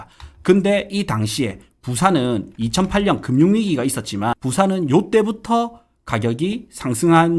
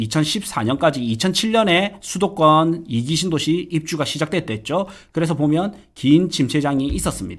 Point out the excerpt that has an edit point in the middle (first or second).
first